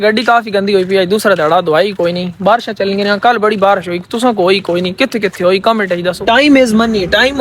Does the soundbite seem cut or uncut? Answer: cut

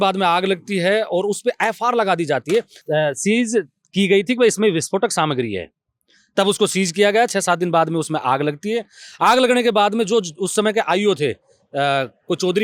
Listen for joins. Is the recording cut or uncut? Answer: uncut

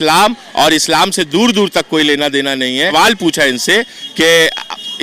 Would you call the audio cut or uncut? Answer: cut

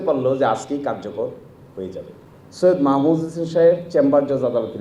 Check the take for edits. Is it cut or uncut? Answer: cut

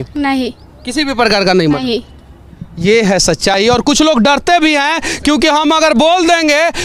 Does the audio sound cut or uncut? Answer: uncut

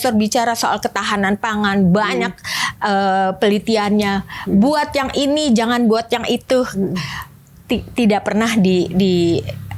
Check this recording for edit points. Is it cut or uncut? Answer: uncut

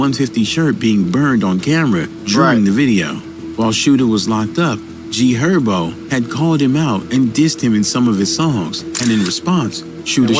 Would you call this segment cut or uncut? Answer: uncut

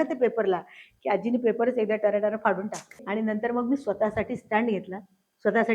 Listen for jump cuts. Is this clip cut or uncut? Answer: cut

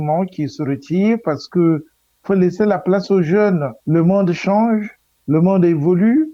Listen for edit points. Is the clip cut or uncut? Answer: uncut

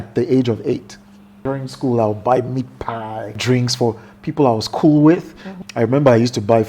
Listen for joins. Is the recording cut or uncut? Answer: cut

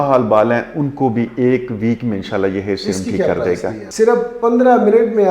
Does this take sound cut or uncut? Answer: cut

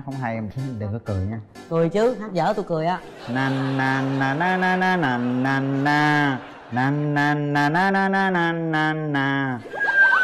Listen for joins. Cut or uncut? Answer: uncut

